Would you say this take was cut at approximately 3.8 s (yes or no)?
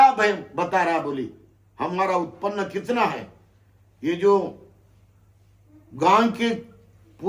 no